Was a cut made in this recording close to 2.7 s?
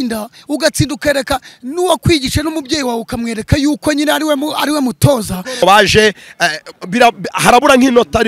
no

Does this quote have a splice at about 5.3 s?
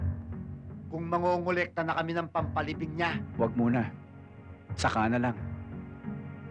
no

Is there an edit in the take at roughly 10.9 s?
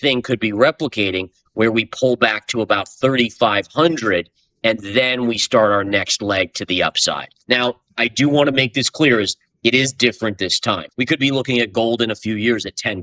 yes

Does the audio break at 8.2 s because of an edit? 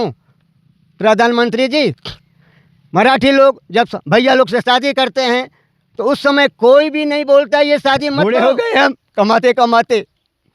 yes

